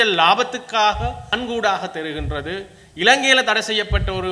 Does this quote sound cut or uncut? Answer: cut